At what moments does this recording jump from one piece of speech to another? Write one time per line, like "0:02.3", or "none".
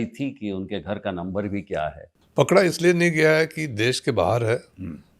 0:02.1